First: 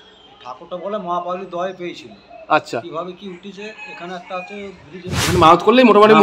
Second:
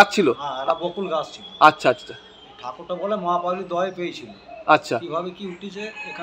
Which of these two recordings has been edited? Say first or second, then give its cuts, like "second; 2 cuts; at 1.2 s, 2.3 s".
first; 1 cut; at 5.2 s